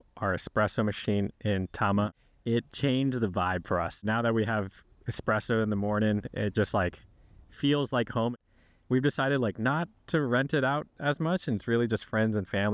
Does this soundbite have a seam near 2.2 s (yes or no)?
yes